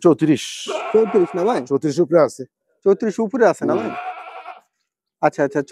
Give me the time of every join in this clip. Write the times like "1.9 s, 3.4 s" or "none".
none